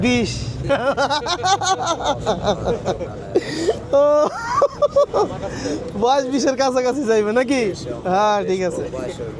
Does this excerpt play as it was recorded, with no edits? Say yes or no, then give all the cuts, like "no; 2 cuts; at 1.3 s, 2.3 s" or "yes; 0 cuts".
yes; 0 cuts